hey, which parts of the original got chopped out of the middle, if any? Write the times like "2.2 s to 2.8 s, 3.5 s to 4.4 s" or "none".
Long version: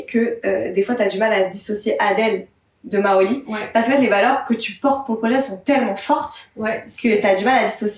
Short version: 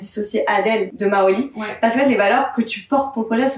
2.4 s to 2.8 s